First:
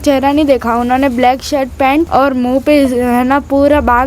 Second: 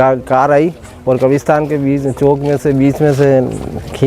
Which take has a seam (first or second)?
first